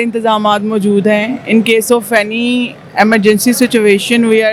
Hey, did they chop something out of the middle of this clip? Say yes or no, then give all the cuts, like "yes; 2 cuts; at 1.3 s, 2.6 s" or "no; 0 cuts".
no; 0 cuts